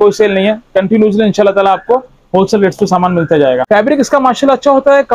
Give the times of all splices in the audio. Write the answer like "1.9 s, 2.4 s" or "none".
3.6 s